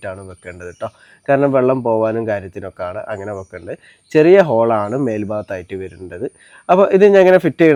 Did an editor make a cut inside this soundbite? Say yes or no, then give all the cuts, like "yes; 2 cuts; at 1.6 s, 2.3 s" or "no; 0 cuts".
no; 0 cuts